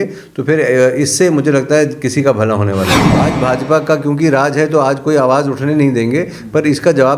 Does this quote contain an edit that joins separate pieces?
yes; 1 cut; at 3.3 s

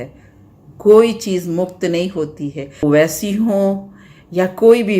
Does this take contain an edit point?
yes; 1 cut; at 2.8 s

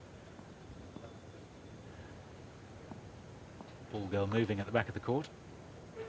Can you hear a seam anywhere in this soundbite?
no; 0 cuts

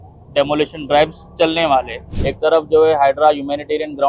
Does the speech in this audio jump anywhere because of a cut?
yes; 1 cut; at 2.0 s

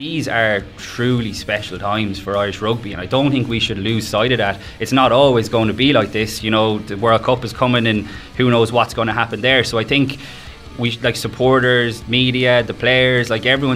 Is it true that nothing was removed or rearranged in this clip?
yes; 0 cuts

